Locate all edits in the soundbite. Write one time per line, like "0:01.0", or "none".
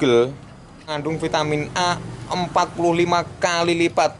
0:00.9